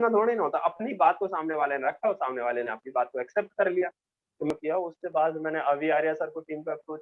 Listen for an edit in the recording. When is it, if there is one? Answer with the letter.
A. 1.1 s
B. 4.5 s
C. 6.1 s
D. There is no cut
B